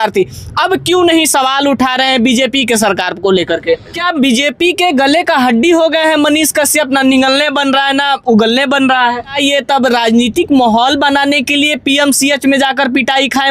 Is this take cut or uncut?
cut